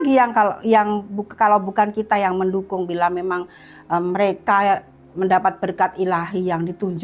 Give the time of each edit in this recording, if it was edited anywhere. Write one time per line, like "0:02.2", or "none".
none